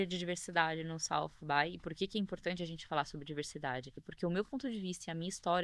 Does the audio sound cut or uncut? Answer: cut